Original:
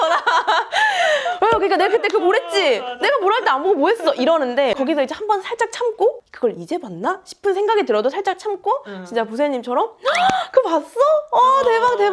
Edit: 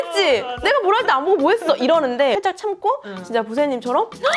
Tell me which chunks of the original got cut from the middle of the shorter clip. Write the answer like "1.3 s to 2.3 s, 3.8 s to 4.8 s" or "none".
4.8 s to 8.2 s